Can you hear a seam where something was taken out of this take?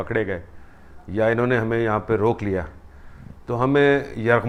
no; 0 cuts

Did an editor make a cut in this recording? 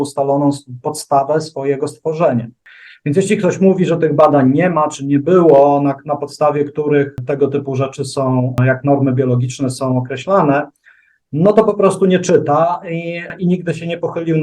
yes; 4 cuts; at 2.6 s, 7.2 s, 8.6 s, 13.3 s

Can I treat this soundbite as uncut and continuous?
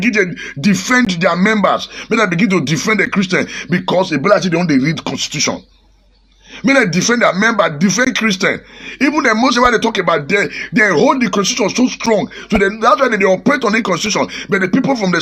yes; 0 cuts

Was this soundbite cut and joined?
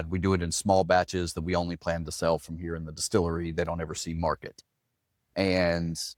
no; 0 cuts

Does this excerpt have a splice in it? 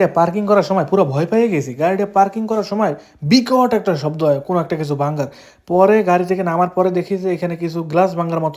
no; 0 cuts

